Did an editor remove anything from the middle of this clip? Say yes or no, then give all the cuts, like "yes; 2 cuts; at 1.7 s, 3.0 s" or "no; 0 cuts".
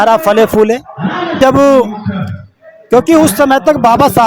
yes; 1 cut; at 1.4 s